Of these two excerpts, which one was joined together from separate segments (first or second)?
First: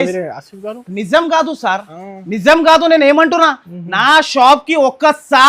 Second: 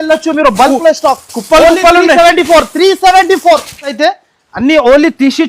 second